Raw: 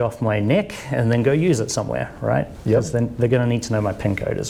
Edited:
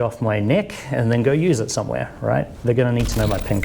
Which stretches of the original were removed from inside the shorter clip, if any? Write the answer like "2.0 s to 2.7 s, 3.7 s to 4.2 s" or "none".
2.6 s to 3.1 s